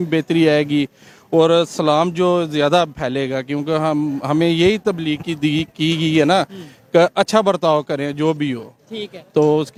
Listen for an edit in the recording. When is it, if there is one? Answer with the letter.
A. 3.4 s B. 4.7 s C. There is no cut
C